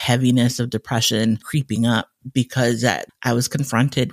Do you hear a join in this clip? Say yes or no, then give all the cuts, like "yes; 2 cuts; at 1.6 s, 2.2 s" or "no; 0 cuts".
yes; 2 cuts; at 1.5 s, 3.1 s